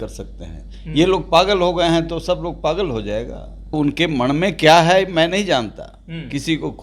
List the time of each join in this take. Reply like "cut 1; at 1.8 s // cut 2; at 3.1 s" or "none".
cut 1; at 3.7 s